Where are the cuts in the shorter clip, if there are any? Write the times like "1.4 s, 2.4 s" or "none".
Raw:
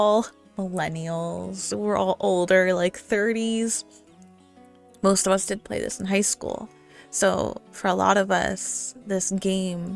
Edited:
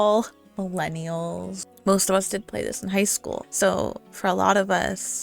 1.6 s, 3.4 s